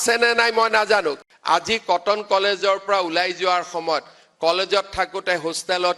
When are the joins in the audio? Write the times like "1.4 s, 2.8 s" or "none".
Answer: 1.2 s